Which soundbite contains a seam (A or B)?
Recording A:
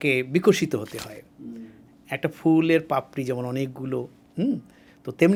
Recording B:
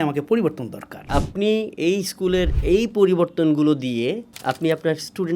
B